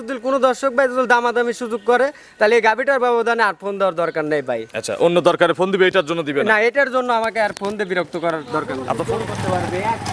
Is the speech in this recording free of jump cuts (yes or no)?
no